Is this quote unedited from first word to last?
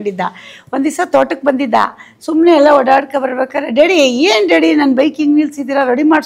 yes; 0 cuts

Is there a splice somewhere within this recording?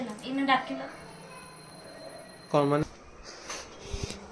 yes; 1 cut; at 2.8 s

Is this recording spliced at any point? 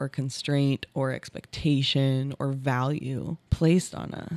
yes; 1 cut; at 3.4 s

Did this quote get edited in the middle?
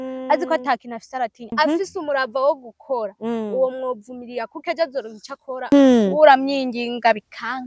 yes; 2 cuts; at 1.4 s, 5.7 s

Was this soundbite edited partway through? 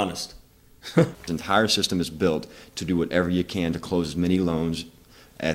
yes; 1 cut; at 1.4 s

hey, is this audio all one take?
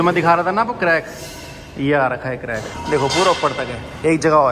no; 1 cut; at 2.7 s

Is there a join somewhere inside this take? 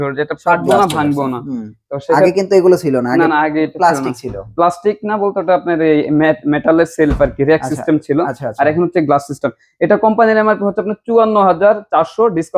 no; 0 cuts

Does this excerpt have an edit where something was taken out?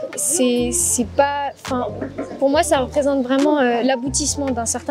no; 0 cuts

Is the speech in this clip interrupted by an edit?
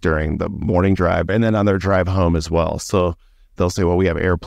yes; 2 cuts; at 1.3 s, 3.5 s

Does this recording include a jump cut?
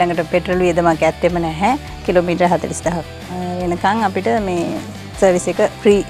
yes; 1 cut; at 1.9 s

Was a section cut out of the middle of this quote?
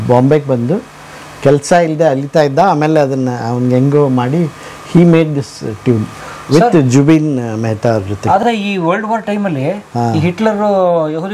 no; 0 cuts

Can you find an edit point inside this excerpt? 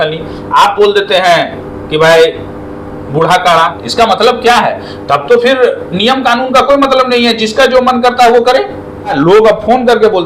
yes; 2 cuts; at 3.8 s, 9.1 s

